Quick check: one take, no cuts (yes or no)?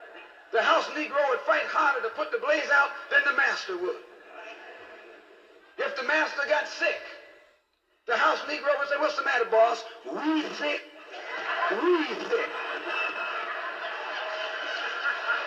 no